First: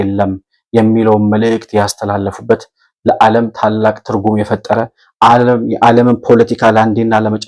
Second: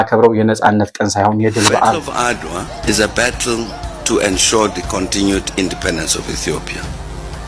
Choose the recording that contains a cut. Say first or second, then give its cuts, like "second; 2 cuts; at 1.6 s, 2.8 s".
second; 1 cut; at 2.1 s